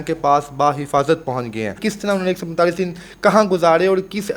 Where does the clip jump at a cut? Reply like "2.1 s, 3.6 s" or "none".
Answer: 1.8 s